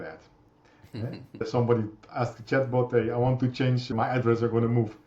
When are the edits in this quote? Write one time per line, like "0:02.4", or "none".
0:01.4
0:03.9